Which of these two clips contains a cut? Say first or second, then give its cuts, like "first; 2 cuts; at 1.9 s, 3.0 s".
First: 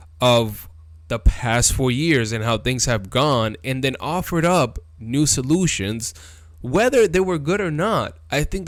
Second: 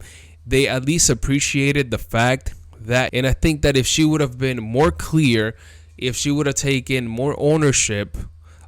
second; 1 cut; at 3.1 s